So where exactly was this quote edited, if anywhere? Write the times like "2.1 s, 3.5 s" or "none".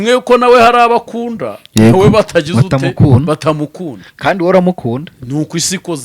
none